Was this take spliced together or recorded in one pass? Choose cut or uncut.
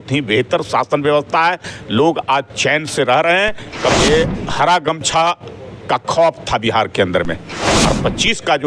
cut